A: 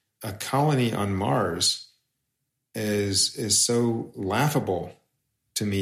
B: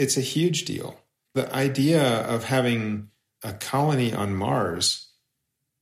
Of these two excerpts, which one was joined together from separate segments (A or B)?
B